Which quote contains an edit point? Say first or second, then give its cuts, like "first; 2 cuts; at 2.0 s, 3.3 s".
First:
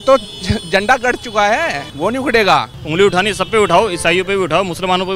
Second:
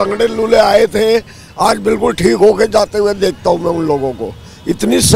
first; 2 cuts; at 1.9 s, 2.8 s